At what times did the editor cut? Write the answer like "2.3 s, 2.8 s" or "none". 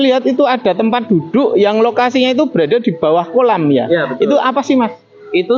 none